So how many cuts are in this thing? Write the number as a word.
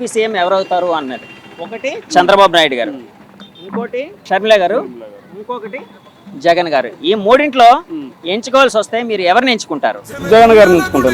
one